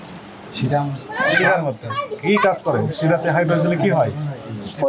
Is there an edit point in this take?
no; 0 cuts

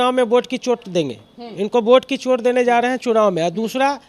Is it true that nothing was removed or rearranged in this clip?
yes; 0 cuts

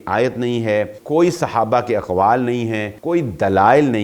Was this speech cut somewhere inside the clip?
yes; 2 cuts; at 1.0 s, 2.9 s

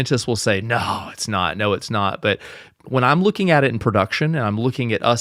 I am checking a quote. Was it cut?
no; 0 cuts

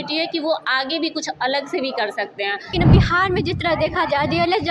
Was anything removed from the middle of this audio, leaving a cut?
yes; 1 cut; at 2.7 s

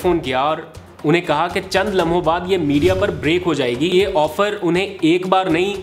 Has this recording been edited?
yes; 1 cut; at 3.9 s

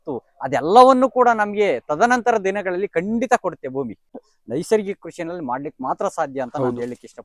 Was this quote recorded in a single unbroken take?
no; 1 cut; at 4.2 s

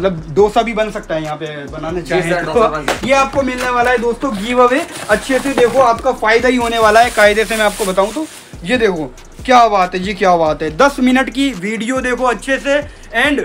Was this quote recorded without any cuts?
no; 1 cut; at 3.0 s

